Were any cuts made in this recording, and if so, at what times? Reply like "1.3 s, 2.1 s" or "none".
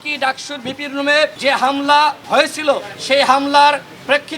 1.4 s, 2.5 s